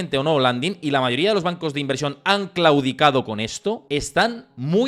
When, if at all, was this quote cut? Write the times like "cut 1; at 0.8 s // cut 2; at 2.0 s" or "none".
cut 1; at 3.8 s